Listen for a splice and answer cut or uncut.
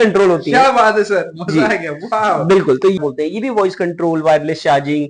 cut